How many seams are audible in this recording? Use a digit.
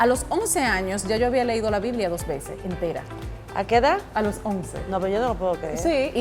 0